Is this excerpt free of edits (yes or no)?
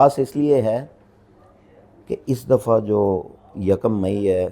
yes